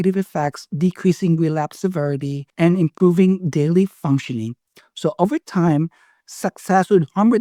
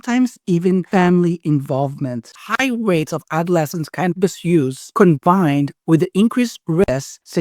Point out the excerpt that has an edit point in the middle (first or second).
second